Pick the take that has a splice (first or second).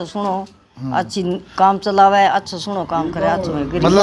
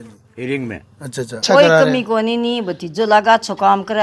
second